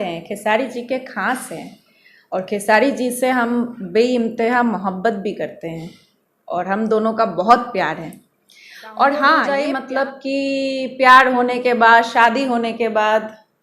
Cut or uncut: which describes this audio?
cut